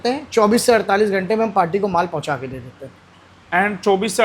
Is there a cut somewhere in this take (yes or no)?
no